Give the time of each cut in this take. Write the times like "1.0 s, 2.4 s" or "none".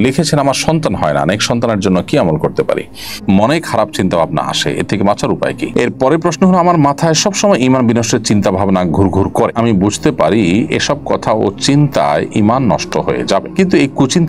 3.1 s, 5.6 s

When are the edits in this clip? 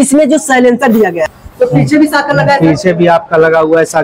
1.4 s

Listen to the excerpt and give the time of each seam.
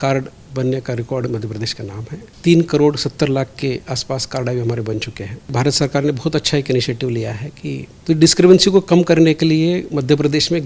2.3 s, 5.5 s, 7.9 s

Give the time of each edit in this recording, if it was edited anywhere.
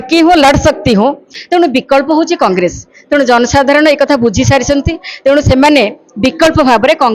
1.3 s

